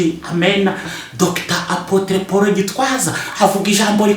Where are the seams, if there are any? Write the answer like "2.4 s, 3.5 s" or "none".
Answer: 1.0 s